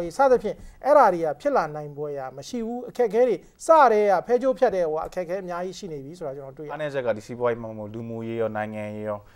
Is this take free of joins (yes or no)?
no